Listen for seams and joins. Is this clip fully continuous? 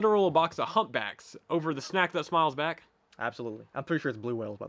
yes; 0 cuts

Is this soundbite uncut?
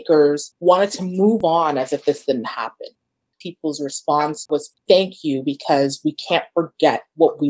no; 1 cut; at 3.2 s

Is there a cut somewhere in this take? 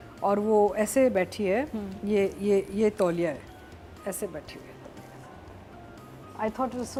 no; 0 cuts

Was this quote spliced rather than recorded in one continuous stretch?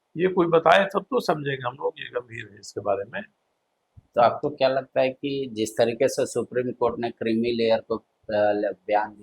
no; 0 cuts

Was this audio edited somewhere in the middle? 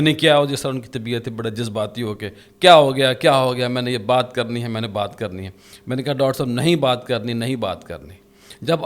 no; 0 cuts

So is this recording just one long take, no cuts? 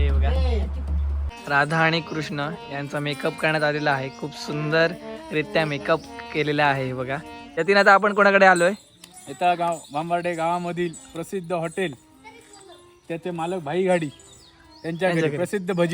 no; 2 cuts; at 1.2 s, 7.4 s

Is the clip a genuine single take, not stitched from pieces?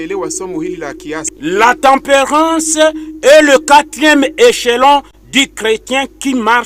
no; 1 cut; at 1.2 s

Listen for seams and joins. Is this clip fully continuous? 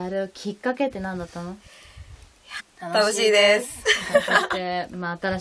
yes; 0 cuts

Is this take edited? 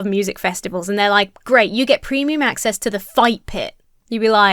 no; 0 cuts

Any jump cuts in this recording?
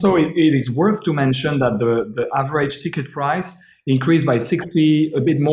no; 0 cuts

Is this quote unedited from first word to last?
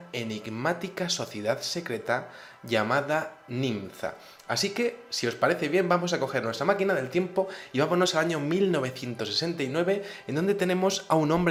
yes; 0 cuts

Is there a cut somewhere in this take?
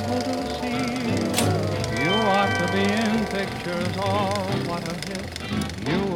no; 0 cuts

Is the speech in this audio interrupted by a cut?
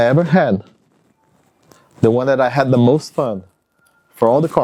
no; 0 cuts

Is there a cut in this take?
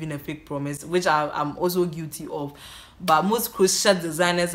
no; 0 cuts

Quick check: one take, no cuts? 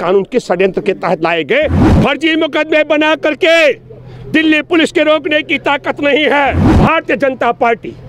no; 2 cuts; at 1.8 s, 6.7 s

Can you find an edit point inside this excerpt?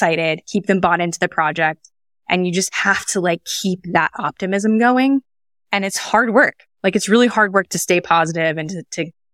no; 0 cuts

